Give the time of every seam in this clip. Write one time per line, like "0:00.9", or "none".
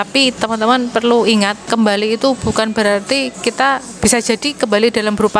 0:01.6